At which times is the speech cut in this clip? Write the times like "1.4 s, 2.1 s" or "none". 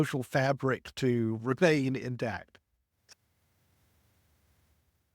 none